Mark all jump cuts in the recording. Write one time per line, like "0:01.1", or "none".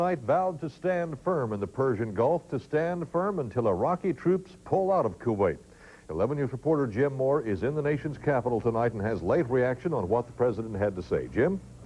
0:06.9